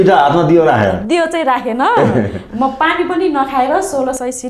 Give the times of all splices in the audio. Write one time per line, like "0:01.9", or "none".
none

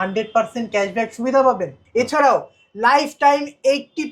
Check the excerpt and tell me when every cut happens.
0:01.7

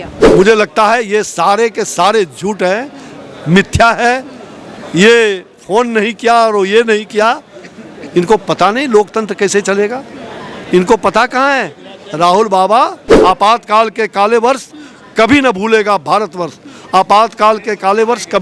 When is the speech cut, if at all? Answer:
0:13.1

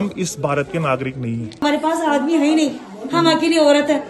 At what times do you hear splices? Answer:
0:01.6

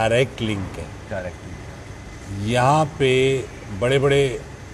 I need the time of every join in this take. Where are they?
none

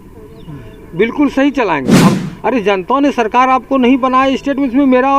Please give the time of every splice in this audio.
0:02.1

